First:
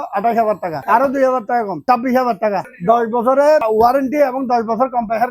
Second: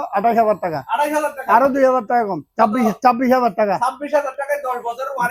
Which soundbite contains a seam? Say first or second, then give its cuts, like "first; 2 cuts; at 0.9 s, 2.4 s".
first; 4 cuts; at 0.8 s, 1.8 s, 2.7 s, 3.6 s